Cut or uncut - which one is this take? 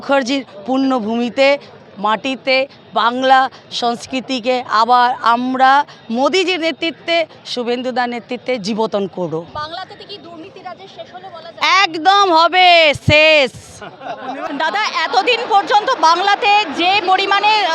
uncut